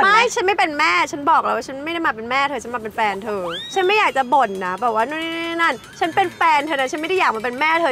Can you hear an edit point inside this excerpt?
no; 0 cuts

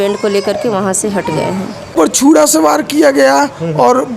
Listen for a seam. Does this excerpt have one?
yes; 1 cut; at 1.9 s

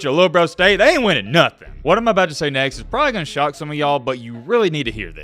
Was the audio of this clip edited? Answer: yes; 1 cut; at 1.7 s

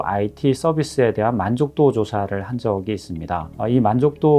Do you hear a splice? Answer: yes; 1 cut; at 3.5 s

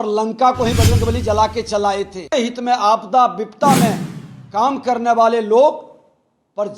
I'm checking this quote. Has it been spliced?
yes; 1 cut; at 2.3 s

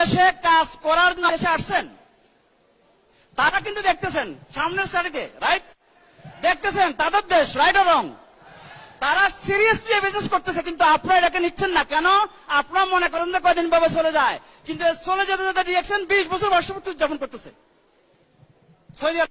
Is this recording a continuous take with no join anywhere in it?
no; 1 cut; at 1.3 s

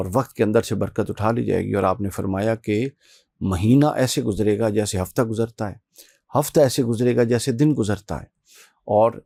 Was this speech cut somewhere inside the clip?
no; 0 cuts

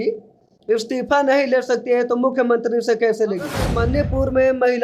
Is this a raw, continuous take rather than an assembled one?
no; 1 cut; at 3.7 s

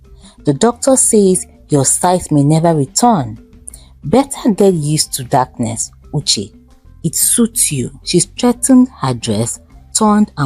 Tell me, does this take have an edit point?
yes; 1 cut; at 8.0 s

